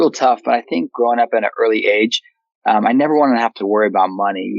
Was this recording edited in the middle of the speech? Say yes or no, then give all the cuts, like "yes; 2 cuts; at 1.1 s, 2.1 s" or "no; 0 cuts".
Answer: yes; 1 cut; at 0.9 s